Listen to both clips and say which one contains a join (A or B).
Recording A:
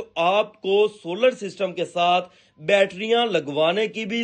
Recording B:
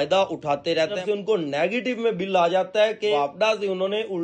B